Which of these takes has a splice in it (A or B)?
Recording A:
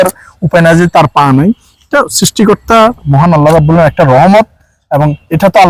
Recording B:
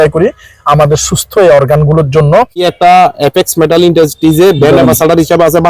B